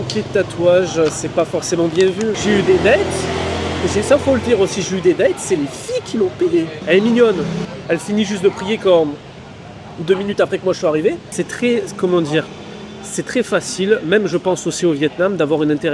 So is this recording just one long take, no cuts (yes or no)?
no